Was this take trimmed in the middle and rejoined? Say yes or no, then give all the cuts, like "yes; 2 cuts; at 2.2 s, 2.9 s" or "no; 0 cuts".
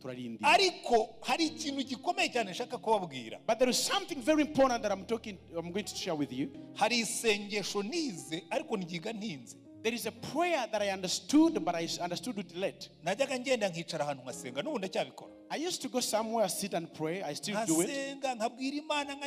yes; 1 cut; at 6.6 s